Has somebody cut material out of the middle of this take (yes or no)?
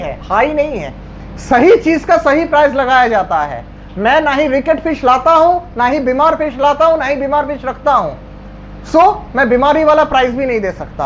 no